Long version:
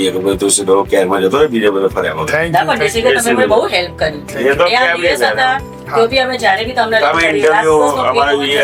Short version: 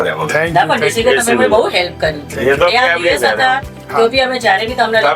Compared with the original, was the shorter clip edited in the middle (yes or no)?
no